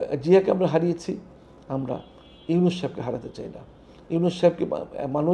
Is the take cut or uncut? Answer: uncut